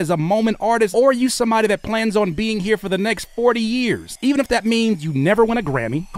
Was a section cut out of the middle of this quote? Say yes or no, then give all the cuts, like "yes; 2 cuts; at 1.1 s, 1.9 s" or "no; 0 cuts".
yes; 2 cuts; at 0.9 s, 4.1 s